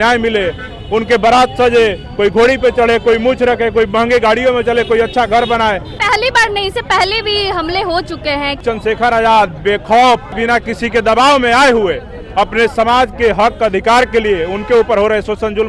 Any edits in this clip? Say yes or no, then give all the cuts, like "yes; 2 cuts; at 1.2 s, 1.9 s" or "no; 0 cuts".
yes; 3 cuts; at 5.9 s, 8.6 s, 10.3 s